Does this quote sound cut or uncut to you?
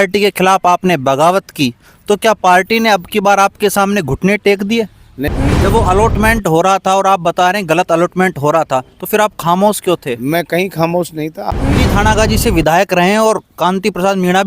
cut